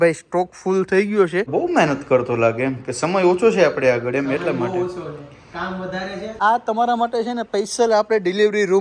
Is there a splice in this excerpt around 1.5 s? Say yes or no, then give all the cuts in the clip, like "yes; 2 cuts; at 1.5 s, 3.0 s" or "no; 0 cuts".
yes; 2 cuts; at 1.5 s, 6.4 s